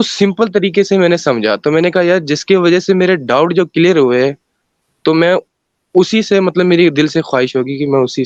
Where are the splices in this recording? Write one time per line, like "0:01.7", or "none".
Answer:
none